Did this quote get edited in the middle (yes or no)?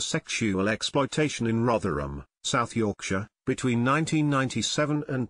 no